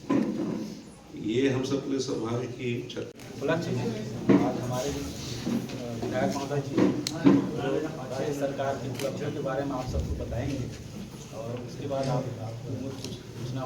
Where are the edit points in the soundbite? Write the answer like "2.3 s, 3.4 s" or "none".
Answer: 3.1 s